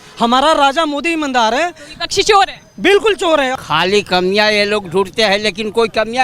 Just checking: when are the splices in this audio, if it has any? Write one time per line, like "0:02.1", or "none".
0:03.5